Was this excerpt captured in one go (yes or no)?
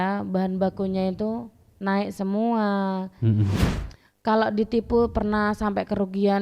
no